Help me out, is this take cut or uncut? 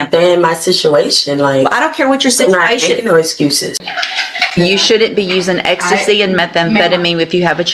cut